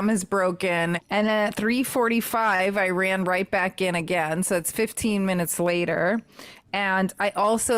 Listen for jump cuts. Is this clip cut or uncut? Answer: cut